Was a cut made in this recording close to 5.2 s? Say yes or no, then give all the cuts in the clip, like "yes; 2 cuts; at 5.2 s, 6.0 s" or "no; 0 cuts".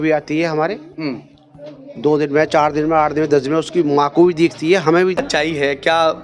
yes; 1 cut; at 5.2 s